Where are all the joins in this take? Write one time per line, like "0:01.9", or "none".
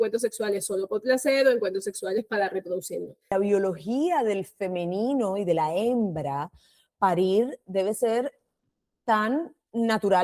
0:03.3